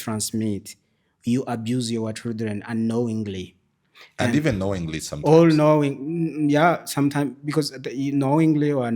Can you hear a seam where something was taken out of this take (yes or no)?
no